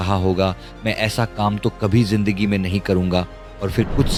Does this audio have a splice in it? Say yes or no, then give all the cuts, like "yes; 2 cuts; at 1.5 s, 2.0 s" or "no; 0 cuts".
no; 0 cuts